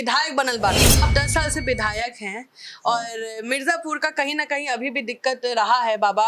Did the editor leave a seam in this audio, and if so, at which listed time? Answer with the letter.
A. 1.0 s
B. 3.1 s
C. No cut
A